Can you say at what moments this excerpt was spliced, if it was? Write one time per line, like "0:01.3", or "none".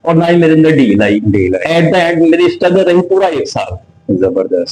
none